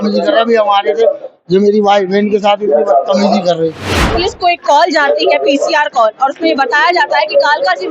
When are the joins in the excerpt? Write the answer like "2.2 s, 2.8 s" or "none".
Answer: 4.0 s